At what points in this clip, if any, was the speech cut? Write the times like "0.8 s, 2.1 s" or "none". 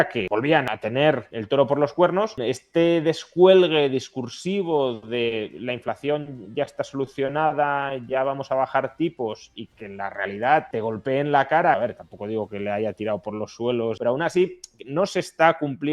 0.8 s, 2.4 s, 10.7 s, 11.7 s, 14.0 s